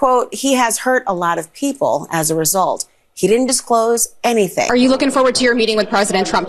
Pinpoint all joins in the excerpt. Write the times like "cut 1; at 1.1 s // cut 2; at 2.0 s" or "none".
cut 1; at 4.7 s